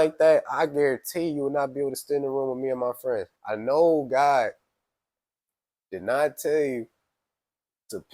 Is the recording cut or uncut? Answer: cut